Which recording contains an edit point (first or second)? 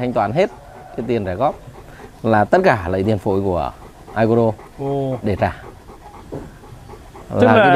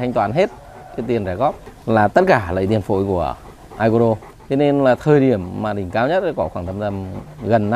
second